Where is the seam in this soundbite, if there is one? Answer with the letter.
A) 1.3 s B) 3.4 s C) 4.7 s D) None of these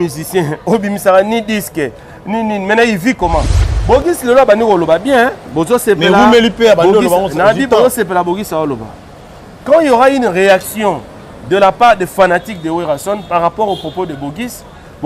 B